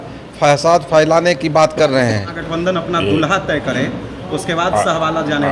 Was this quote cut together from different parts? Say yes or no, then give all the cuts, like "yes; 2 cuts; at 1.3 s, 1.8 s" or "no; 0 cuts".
yes; 1 cut; at 2.4 s